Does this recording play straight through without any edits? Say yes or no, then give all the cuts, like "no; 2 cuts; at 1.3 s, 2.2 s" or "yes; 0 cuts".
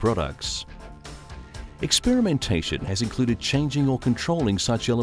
no; 1 cut; at 2.8 s